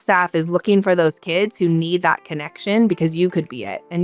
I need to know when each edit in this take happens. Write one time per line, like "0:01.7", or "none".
none